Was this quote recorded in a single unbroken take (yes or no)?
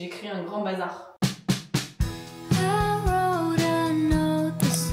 yes